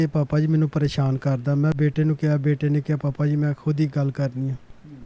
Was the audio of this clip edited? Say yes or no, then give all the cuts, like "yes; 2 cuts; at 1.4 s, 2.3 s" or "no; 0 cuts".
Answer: no; 0 cuts